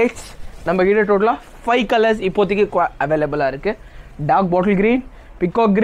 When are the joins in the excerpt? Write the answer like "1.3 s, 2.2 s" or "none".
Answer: none